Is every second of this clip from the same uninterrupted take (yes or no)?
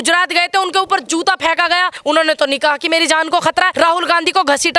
no